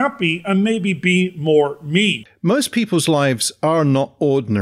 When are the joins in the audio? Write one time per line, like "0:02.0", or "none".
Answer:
0:02.3